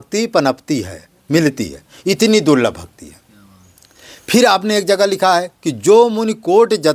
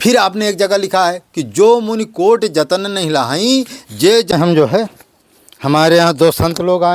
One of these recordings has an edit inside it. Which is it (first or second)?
second